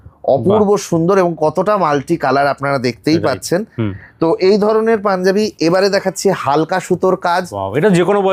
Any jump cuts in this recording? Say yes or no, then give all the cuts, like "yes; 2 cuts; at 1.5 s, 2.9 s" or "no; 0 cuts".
no; 0 cuts